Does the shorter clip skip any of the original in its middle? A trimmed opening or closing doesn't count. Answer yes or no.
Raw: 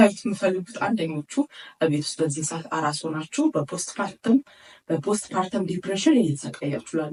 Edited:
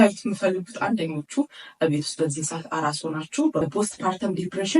yes